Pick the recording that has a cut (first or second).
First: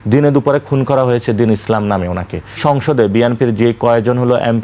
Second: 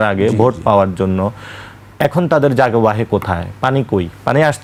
first